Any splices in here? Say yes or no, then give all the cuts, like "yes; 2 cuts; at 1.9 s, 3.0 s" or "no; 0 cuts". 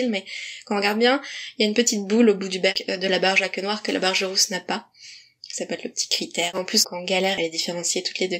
yes; 1 cut; at 6.6 s